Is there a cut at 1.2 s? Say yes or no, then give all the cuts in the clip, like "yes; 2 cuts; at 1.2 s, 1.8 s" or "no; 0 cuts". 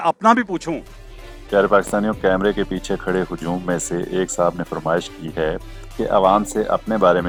no; 0 cuts